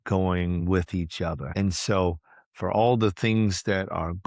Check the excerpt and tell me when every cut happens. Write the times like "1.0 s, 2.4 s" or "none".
1.4 s